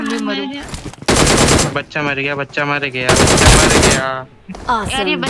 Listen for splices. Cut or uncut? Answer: uncut